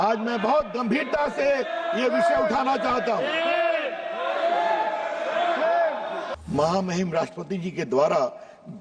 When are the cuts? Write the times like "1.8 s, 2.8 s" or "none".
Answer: 6.3 s

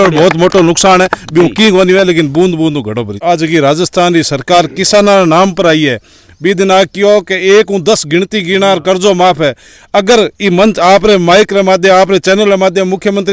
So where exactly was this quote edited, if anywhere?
3.2 s

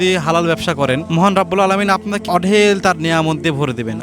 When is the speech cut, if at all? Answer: 1.0 s, 2.2 s

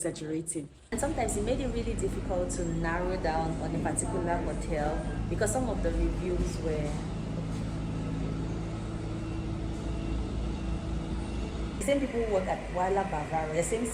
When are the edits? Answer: 0.9 s

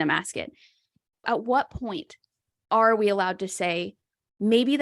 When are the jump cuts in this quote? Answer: 1.2 s

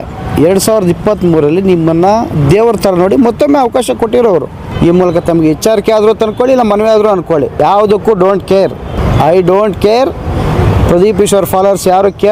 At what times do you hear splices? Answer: 4.6 s, 7.6 s, 9.0 s

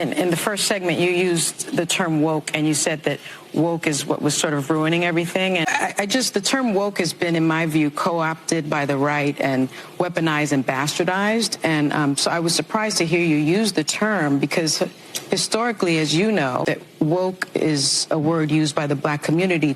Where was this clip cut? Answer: 5.6 s, 16.6 s

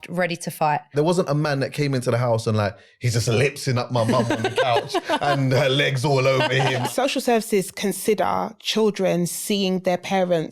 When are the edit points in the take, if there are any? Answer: 0.9 s, 6.9 s

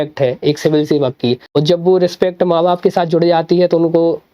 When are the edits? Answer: 1.4 s

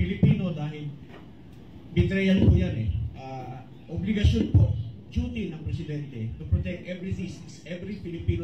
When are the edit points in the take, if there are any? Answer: 3.6 s

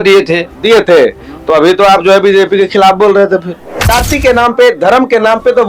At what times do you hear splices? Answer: 3.9 s

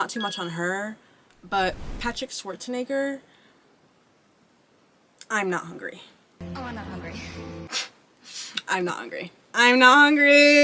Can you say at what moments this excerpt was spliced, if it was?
none

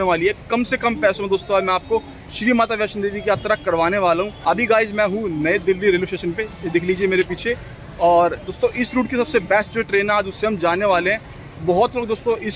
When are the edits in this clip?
4.3 s

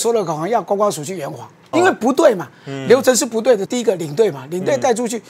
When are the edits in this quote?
1.7 s, 3.6 s

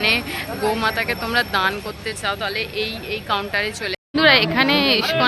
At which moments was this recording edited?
4.0 s

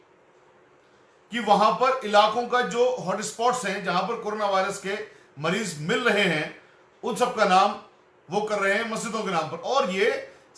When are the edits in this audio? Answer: none

